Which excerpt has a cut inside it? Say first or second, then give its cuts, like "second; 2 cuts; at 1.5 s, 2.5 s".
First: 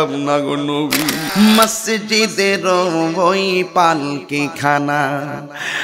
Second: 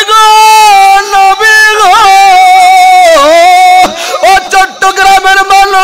first; 1 cut; at 1.2 s